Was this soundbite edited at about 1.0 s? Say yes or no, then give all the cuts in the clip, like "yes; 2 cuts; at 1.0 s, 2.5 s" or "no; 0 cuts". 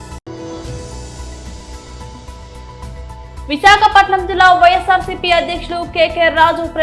no; 1 cut; at 3.4 s